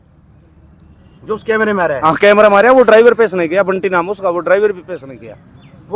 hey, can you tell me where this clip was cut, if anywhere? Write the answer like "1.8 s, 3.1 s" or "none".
none

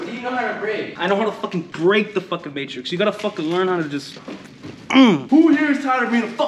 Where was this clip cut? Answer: 0.9 s, 1.7 s, 5.2 s

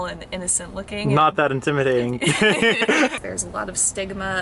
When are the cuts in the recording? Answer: 3.1 s

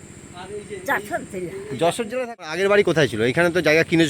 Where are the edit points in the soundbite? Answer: 2.8 s

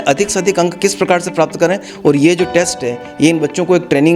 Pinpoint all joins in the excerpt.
1.9 s

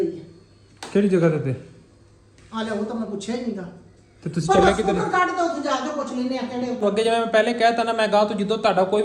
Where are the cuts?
6.8 s

